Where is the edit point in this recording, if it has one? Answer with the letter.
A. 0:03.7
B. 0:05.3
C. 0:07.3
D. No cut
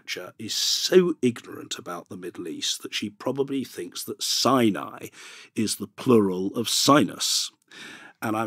D